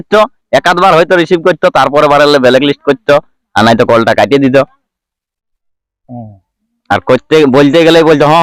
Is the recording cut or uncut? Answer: uncut